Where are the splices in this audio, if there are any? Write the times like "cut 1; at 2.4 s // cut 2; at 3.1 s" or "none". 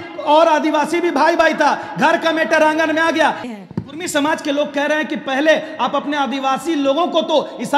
cut 1; at 3.5 s